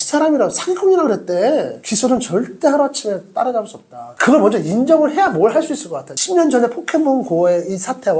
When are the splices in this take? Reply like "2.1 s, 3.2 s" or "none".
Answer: 1.8 s, 6.3 s